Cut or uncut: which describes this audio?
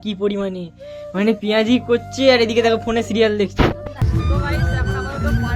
cut